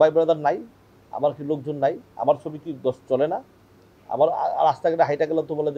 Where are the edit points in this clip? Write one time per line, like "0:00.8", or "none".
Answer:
none

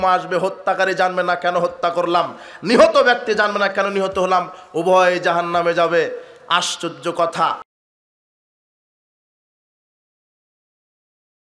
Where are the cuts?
none

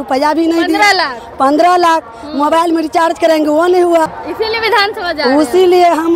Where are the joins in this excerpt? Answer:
0:04.2

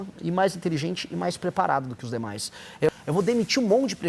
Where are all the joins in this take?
0:02.9

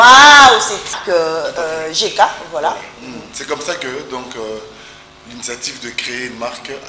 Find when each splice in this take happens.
0:01.0

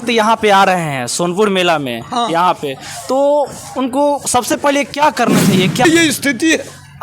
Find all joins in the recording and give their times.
0:05.8

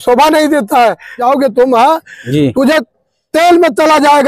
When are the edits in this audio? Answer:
0:01.2

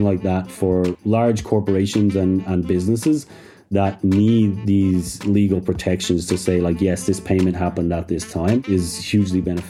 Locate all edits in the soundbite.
0:01.0
0:08.6

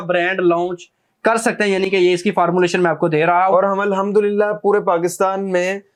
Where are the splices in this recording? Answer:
none

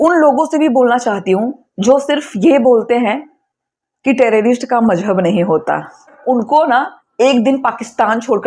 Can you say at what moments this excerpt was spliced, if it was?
0:06.2

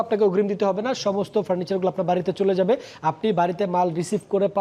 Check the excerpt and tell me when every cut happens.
none

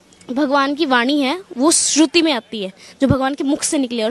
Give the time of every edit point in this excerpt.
none

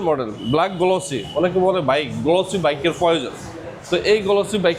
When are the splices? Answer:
none

